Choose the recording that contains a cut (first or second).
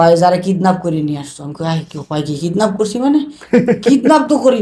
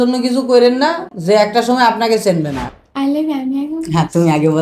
second